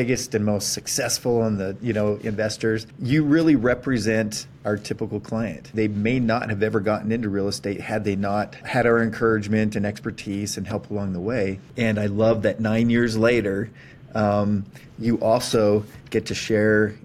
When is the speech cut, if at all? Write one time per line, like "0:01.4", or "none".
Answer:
0:02.9
0:05.7
0:08.6
0:11.6